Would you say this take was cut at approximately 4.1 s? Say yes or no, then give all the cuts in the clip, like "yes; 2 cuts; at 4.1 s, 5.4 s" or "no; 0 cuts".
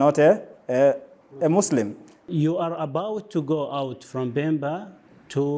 no; 1 cut; at 2.2 s